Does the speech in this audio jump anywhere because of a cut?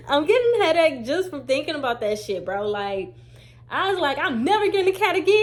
no; 0 cuts

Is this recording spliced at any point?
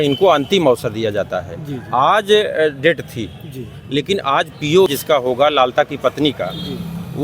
yes; 1 cut; at 4.9 s

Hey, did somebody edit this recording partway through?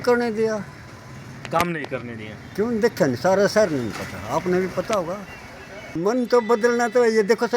yes; 1 cut; at 6.0 s

